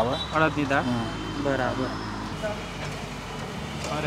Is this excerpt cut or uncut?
cut